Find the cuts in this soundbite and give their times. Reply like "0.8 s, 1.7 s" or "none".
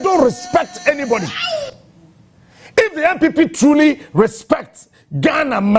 none